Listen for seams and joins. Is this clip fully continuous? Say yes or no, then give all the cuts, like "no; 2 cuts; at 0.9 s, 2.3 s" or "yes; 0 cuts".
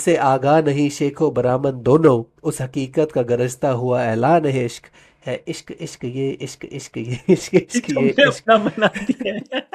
yes; 0 cuts